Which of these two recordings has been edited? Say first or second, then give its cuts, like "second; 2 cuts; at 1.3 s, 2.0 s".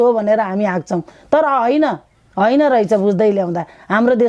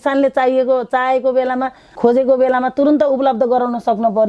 second; 1 cut; at 2.0 s